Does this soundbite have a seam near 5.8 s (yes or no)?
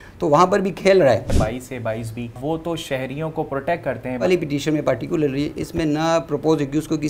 no